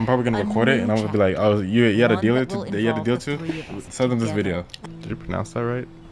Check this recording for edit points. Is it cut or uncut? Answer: cut